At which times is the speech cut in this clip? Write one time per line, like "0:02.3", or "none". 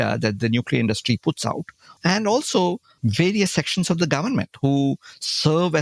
0:02.0
0:02.9